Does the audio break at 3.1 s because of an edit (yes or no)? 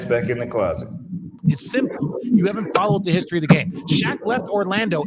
no